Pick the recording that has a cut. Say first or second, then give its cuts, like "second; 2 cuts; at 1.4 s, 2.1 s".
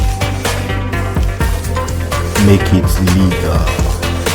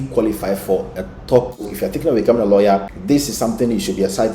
second; 2 cuts; at 1.6 s, 2.9 s